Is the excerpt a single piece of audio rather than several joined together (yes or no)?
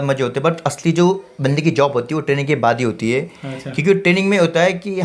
yes